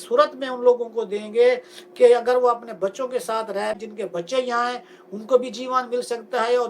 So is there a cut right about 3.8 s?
yes; 1 cut; at 3.8 s

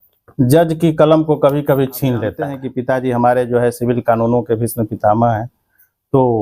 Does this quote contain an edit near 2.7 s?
yes; 1 cut; at 2.7 s

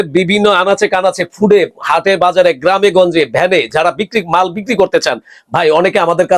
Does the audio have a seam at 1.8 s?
no; 0 cuts

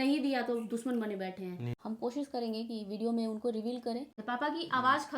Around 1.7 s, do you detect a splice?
yes; 2 cuts; at 1.7 s, 4.2 s

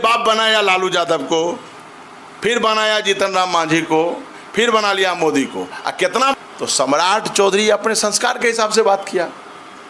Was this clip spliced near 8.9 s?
no; 1 cut; at 6.3 s

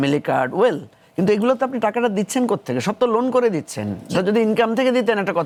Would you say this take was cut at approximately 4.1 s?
no; 0 cuts

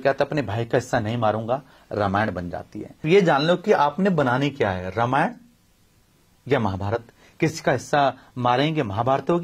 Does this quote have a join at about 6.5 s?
no; 1 cut; at 3.0 s

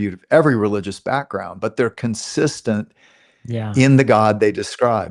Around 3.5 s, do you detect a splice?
no; 0 cuts

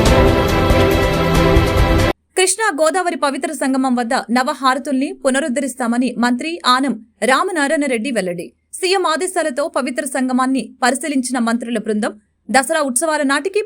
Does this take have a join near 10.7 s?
no; 1 cut; at 2.1 s

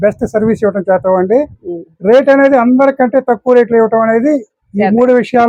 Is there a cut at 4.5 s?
no; 0 cuts

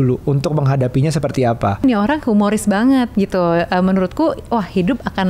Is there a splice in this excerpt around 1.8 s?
yes; 1 cut; at 1.8 s

